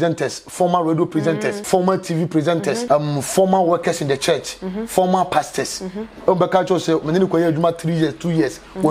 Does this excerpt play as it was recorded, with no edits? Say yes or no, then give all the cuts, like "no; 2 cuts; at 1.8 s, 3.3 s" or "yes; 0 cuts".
no; 2 cuts; at 1.6 s, 2.8 s